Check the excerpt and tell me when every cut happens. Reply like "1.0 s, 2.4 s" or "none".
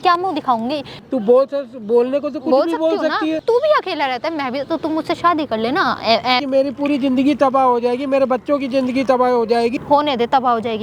0.9 s, 3.4 s, 6.4 s, 9.7 s